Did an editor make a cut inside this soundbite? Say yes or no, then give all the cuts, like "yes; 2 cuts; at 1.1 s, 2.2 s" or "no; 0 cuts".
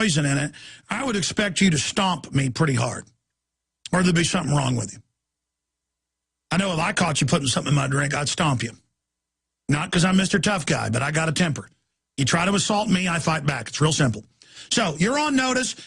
yes; 1 cut; at 1.5 s